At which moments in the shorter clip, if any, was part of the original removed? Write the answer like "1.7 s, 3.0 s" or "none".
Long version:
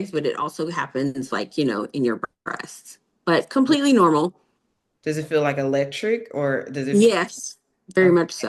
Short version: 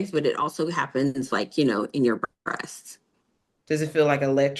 3.1 s